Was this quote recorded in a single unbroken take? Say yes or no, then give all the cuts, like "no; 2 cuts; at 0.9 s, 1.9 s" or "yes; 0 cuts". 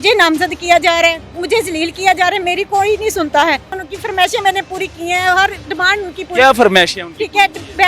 no; 1 cut; at 3.8 s